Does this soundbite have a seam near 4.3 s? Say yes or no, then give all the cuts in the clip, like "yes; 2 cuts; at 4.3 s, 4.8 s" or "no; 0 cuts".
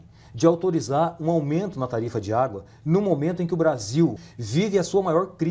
yes; 1 cut; at 4.3 s